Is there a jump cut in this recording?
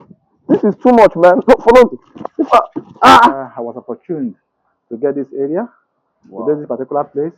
yes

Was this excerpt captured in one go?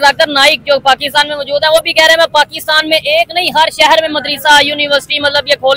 yes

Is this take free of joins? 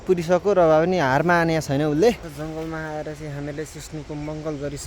no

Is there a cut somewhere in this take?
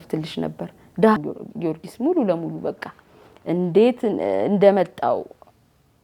yes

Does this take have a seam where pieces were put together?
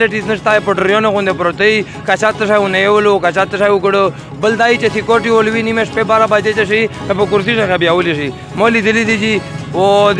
no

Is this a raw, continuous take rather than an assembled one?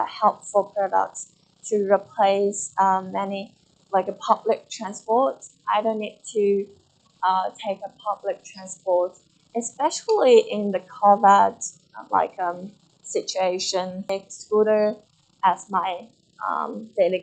no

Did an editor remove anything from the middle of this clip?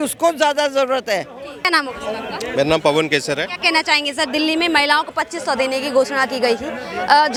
no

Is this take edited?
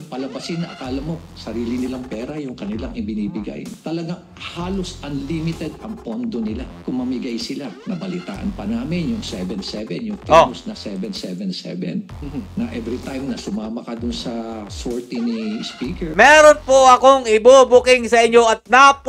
yes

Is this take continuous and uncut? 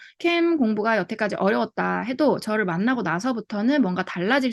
yes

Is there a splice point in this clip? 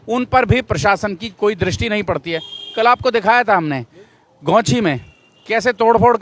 no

